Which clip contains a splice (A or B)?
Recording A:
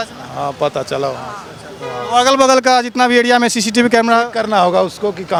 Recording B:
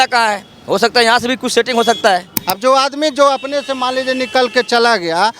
B